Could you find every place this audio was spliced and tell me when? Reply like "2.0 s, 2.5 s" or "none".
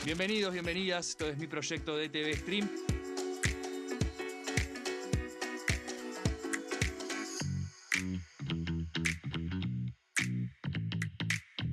none